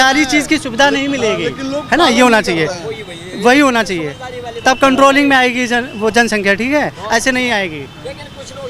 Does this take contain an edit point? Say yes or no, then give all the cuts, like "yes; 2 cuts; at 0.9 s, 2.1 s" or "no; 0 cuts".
no; 0 cuts